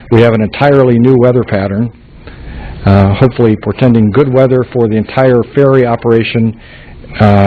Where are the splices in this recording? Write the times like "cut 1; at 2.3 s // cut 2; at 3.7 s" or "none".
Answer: cut 1; at 4.3 s